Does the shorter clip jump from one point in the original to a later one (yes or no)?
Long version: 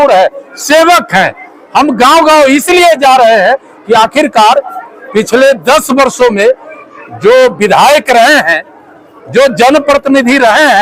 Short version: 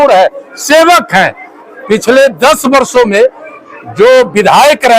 yes